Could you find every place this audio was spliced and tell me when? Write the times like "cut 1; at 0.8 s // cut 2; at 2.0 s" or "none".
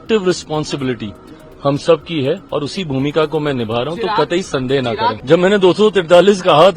cut 1; at 5.2 s